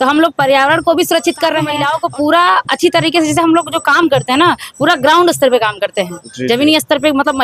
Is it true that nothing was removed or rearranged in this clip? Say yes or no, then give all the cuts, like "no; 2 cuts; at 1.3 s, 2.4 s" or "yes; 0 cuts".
yes; 0 cuts